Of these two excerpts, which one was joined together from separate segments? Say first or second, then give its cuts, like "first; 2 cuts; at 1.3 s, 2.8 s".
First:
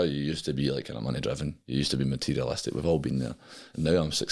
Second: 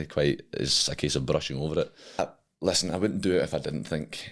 second; 1 cut; at 2.2 s